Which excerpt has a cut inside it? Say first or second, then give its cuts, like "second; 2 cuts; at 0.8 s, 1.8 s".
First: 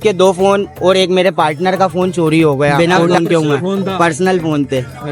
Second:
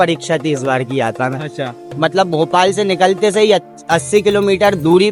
first; 1 cut; at 2.7 s